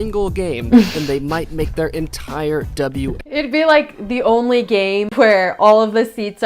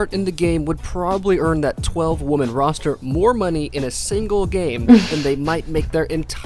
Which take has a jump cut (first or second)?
first